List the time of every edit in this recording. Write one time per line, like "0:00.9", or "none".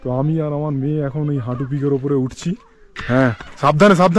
0:02.8